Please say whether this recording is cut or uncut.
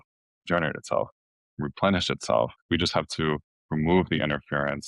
cut